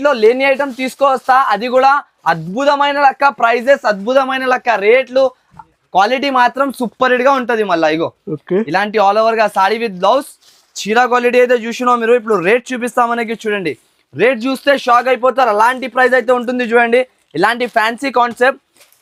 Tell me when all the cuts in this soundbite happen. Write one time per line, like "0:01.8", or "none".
none